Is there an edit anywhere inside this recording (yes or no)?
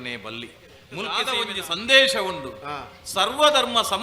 yes